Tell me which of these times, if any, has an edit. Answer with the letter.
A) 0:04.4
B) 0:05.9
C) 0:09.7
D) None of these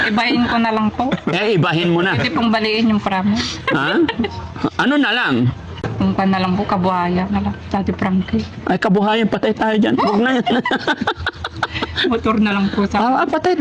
B